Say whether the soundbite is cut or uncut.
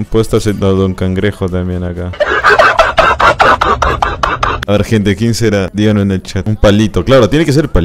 cut